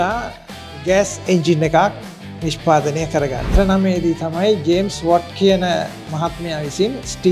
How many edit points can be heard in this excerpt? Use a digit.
1